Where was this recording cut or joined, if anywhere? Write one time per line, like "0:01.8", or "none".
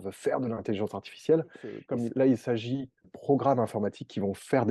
0:01.7
0:03.1